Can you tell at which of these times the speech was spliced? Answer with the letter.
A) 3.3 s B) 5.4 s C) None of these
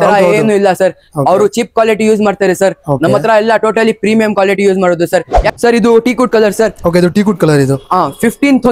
B